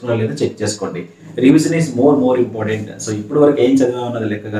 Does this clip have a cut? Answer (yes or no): yes